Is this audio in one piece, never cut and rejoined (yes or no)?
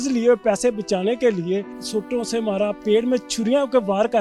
no